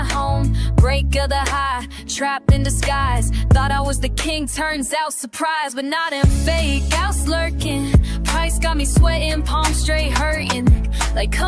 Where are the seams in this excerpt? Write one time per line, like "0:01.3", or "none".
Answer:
none